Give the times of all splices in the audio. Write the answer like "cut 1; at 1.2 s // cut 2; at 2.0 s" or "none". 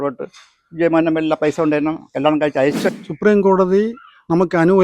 cut 1; at 2.9 s